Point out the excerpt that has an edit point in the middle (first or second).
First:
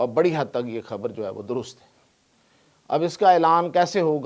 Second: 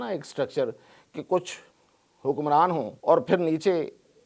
second